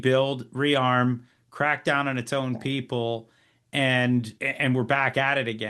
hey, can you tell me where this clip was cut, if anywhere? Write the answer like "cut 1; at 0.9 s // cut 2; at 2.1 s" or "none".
cut 1; at 4.4 s